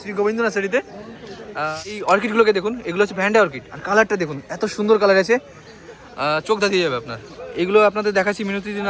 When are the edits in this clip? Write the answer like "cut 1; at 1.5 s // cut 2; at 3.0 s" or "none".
cut 1; at 2.0 s